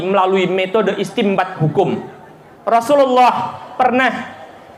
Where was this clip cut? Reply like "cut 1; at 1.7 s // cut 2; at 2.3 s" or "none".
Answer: none